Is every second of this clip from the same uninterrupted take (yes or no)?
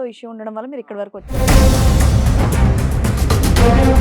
no